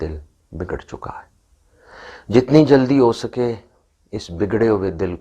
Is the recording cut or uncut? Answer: uncut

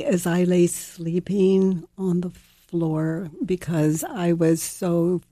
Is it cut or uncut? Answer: uncut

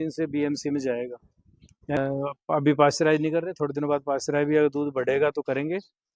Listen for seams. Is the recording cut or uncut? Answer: cut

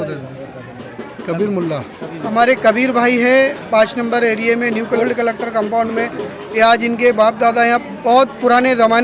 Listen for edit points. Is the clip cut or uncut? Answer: cut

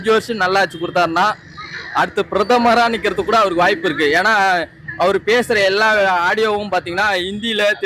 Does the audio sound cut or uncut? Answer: uncut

